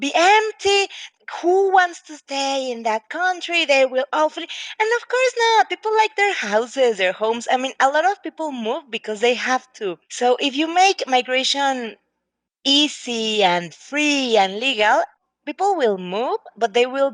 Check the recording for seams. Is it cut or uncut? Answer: cut